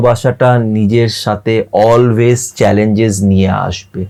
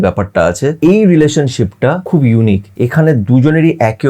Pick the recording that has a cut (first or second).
second